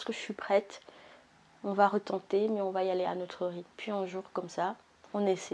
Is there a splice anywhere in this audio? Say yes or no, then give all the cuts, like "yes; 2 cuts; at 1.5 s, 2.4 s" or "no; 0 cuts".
no; 0 cuts